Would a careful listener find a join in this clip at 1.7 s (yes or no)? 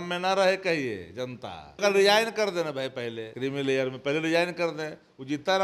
yes